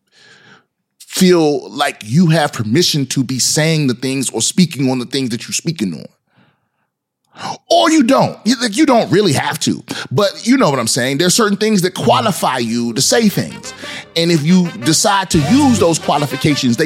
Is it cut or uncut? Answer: uncut